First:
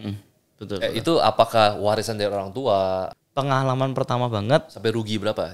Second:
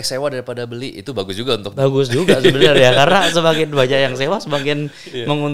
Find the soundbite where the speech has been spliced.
first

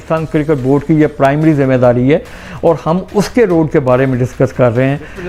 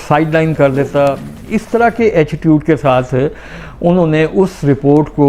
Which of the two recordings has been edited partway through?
second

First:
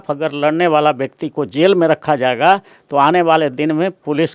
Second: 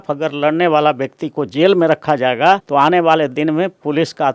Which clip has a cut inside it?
second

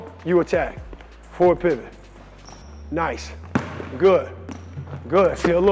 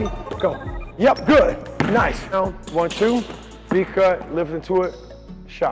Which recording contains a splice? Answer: second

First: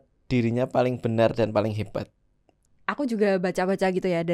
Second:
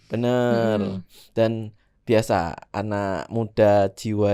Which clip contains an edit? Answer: first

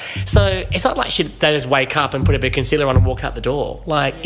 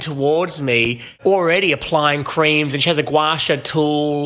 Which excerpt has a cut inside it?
second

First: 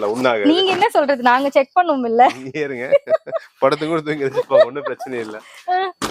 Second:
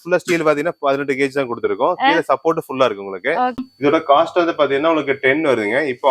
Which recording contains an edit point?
second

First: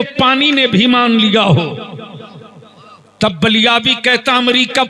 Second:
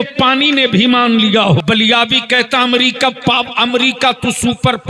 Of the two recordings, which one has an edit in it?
second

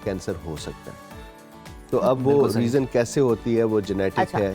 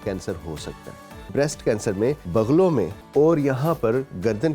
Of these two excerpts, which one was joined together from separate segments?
second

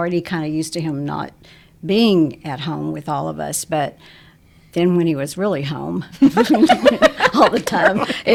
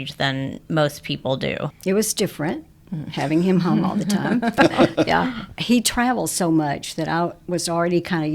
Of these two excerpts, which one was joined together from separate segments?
second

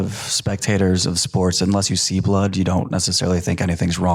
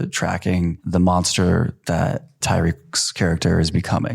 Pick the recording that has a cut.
second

